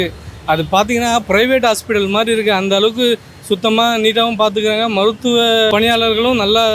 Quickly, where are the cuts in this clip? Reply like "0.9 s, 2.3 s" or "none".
5.7 s